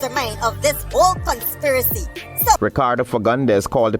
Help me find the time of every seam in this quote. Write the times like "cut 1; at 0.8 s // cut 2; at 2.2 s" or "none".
cut 1; at 2.6 s